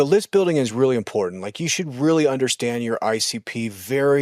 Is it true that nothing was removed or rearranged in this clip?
yes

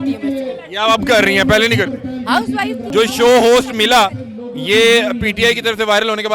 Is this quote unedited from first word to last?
no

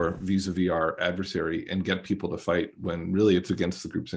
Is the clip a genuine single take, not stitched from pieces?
yes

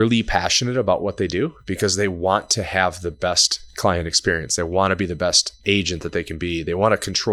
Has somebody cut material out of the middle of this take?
no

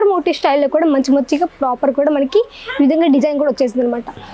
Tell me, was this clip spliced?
no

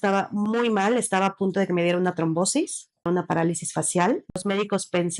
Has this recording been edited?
yes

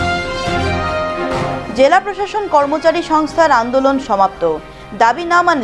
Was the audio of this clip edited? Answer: no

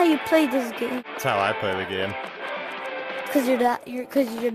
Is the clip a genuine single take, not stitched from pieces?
no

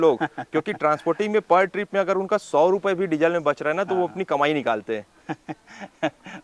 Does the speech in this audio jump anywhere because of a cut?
yes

